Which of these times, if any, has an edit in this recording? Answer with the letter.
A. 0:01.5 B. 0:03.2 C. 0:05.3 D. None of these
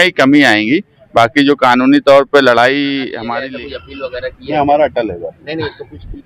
B